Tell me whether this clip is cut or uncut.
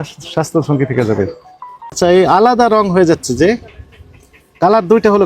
cut